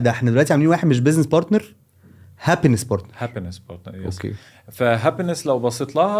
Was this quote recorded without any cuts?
yes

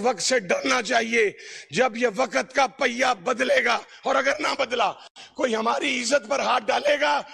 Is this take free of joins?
yes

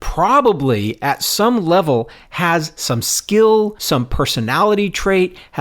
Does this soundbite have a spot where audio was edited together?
yes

